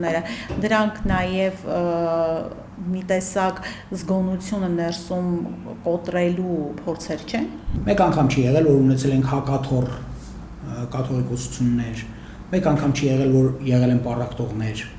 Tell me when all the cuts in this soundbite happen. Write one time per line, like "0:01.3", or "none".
0:07.7